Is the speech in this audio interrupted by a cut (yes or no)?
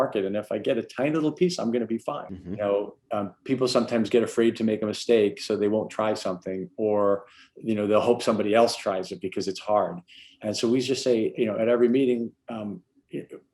yes